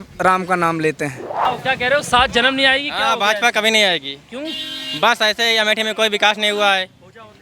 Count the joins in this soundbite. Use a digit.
1